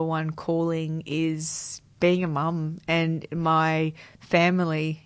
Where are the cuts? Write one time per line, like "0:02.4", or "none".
none